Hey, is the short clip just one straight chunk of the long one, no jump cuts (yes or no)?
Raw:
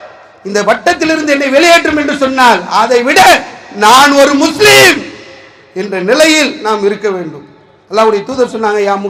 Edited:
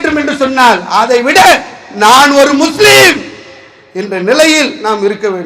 yes